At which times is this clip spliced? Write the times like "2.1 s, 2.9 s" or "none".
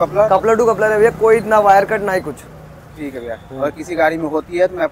none